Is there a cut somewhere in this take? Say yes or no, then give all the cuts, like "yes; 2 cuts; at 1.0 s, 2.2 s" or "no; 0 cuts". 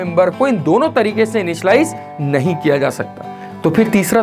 no; 0 cuts